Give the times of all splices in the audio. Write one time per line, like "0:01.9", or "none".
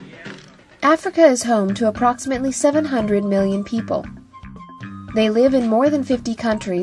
0:04.7